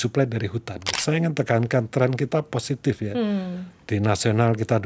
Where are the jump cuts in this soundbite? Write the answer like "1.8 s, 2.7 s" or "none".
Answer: 0.9 s